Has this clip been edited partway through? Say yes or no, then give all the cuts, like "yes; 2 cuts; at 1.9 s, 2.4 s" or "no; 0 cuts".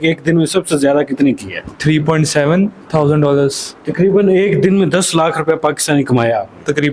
yes; 2 cuts; at 1.7 s, 3.8 s